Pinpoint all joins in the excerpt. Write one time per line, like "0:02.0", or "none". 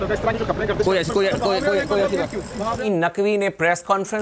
0:02.8